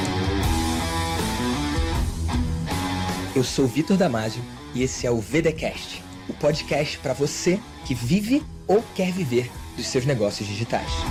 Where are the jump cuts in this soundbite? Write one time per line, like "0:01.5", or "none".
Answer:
none